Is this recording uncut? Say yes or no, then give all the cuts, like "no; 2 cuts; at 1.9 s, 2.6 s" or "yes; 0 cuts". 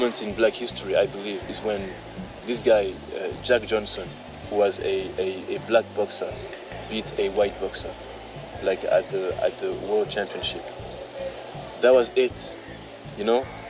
yes; 0 cuts